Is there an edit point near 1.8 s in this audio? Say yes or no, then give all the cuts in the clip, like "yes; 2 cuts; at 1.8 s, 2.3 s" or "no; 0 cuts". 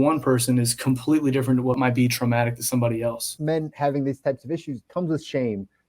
yes; 3 cuts; at 1.8 s, 3.3 s, 4.8 s